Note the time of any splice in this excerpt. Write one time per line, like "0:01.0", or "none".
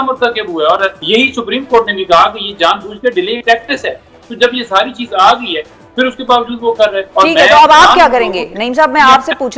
0:01.0